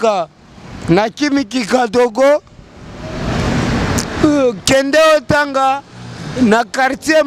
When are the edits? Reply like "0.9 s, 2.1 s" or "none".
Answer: none